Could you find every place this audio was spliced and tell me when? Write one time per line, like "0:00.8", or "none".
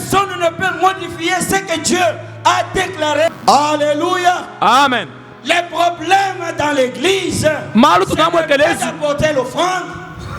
0:03.3